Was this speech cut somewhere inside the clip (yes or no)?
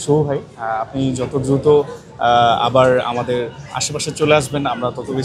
no